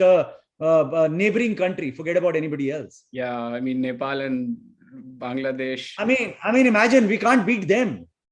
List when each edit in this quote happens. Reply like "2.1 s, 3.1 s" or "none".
none

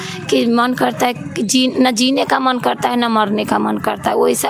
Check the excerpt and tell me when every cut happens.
none

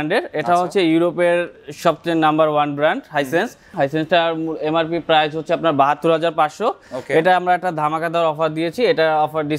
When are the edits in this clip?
3.7 s

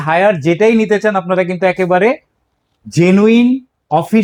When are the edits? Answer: none

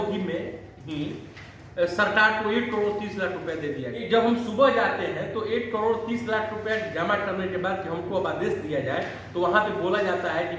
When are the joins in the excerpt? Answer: 3.9 s

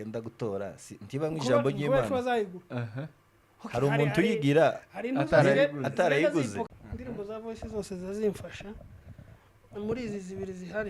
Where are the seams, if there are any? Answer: 6.7 s

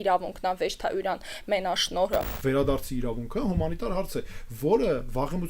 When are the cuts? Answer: 2.3 s

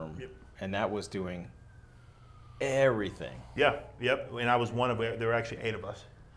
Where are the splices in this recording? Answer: none

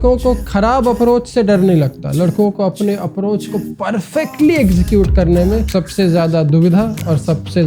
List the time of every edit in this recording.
none

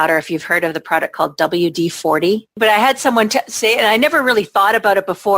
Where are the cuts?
2.5 s

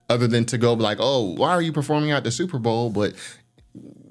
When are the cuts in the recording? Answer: 1.4 s

